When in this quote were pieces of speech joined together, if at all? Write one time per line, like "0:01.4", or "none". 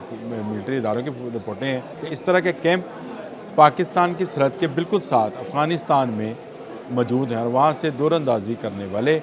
0:01.9